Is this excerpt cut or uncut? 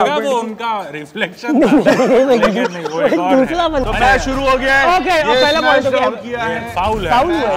cut